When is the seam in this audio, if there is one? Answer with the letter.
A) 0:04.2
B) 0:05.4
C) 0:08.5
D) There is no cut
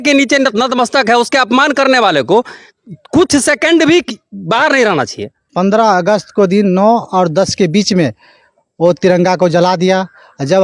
B